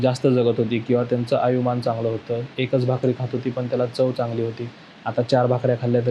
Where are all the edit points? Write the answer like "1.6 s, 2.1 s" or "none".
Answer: none